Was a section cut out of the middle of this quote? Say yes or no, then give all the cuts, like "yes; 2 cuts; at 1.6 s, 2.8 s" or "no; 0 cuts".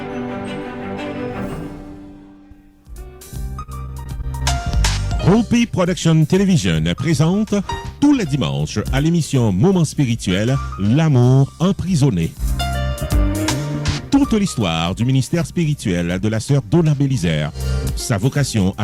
yes; 1 cut; at 3.0 s